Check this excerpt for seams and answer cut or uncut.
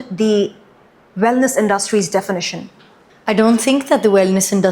uncut